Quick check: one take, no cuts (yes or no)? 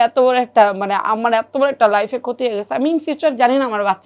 yes